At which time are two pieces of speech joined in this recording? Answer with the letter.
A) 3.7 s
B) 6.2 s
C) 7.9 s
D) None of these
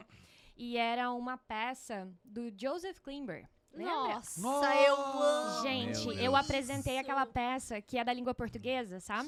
D